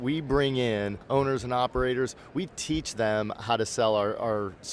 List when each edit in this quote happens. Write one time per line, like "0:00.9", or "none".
0:01.0